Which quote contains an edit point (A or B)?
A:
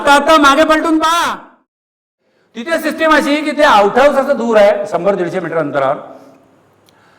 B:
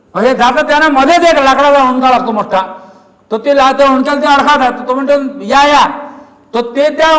A